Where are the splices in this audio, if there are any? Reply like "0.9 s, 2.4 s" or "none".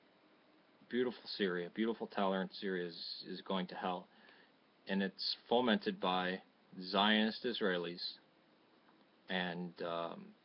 none

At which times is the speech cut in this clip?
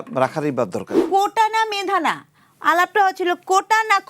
1.0 s

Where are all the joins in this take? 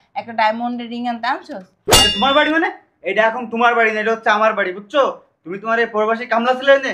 1.8 s

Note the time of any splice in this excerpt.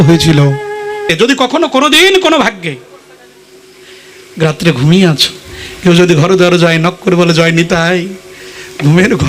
1.1 s

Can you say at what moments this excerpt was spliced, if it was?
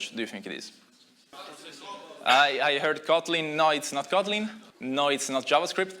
1.3 s, 4.7 s

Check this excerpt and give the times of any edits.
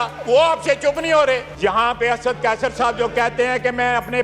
1.5 s

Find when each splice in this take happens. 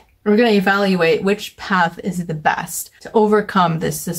none

